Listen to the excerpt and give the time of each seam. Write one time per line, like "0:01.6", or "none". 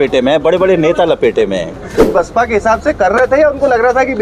0:02.0